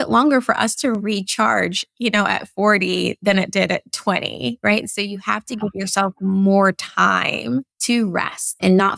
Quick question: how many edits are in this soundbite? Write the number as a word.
one